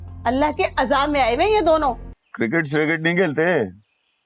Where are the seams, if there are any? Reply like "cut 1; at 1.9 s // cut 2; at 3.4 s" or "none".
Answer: cut 1; at 2.1 s

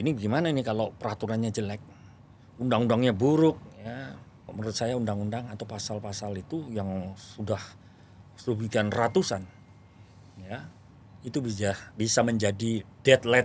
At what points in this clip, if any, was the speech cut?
cut 1; at 4.5 s

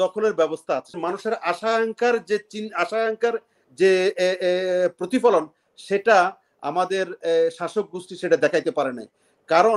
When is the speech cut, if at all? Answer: cut 1; at 1.0 s

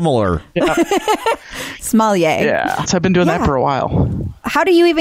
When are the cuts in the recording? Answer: cut 1; at 1.4 s // cut 2; at 2.9 s

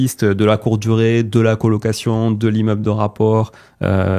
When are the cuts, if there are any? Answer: none

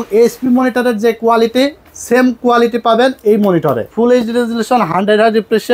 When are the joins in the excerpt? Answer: cut 1; at 3.9 s

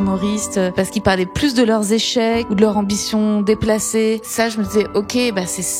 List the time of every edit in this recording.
cut 1; at 0.7 s // cut 2; at 2.5 s // cut 3; at 4.3 s

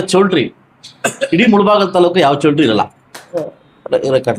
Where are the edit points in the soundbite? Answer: cut 1; at 3.2 s

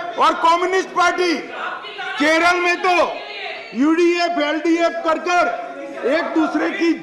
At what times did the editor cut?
none

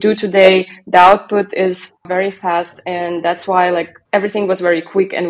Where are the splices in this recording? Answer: cut 1; at 2.1 s // cut 2; at 4.0 s

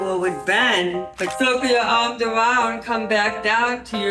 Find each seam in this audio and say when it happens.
cut 1; at 1.3 s

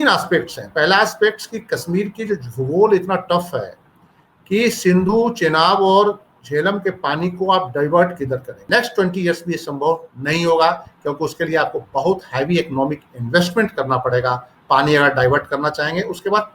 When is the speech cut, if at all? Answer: cut 1; at 8.5 s

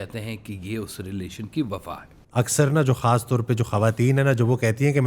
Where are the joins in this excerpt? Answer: cut 1; at 2.1 s

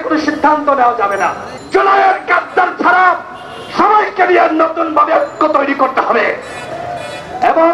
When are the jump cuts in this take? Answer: cut 1; at 1.5 s

